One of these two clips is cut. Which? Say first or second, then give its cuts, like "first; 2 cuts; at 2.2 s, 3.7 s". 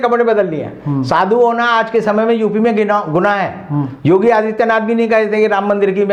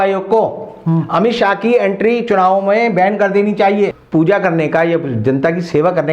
second; 1 cut; at 4.0 s